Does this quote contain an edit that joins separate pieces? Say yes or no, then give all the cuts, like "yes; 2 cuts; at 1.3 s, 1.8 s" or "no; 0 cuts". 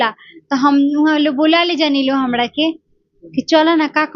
no; 0 cuts